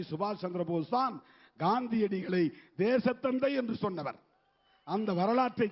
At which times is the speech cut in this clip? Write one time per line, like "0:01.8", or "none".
none